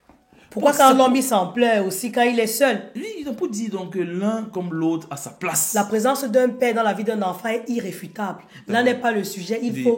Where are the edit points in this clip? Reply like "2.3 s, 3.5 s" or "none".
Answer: none